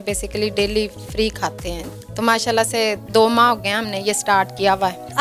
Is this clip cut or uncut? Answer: uncut